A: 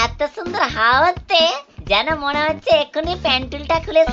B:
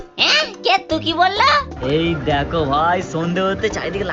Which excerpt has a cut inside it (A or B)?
B